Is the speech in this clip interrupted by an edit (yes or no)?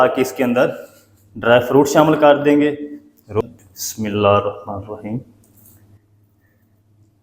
yes